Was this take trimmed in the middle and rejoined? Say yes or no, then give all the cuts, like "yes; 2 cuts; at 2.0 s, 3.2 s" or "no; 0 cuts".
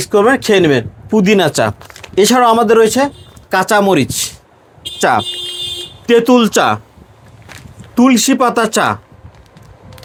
no; 0 cuts